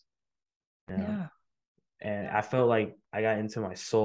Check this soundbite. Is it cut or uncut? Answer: cut